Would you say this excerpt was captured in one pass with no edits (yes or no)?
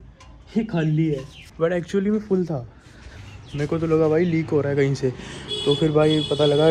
yes